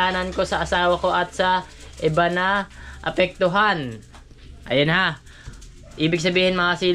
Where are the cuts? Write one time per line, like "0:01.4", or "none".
none